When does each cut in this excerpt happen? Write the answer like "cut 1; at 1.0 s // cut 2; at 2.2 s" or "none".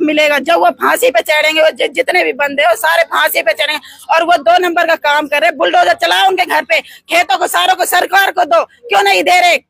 none

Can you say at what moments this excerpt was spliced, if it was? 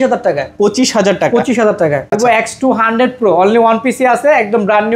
cut 1; at 2.1 s

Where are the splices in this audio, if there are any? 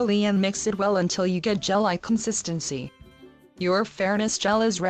none

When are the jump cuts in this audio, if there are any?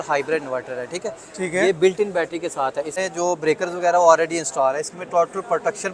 cut 1; at 2.9 s

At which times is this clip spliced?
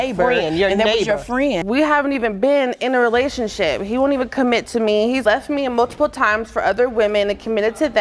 cut 1; at 1.6 s

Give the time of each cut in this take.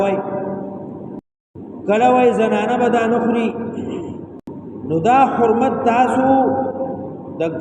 cut 1; at 1.4 s // cut 2; at 4.4 s

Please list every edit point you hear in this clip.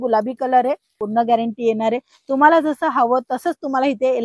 cut 1; at 0.9 s

